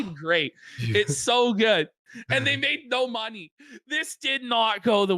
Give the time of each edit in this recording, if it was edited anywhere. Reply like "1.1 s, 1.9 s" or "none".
3.5 s